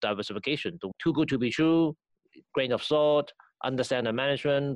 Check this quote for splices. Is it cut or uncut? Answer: cut